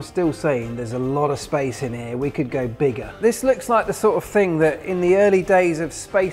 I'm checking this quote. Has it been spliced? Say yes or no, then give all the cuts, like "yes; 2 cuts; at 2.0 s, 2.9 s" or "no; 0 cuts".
yes; 1 cut; at 3.1 s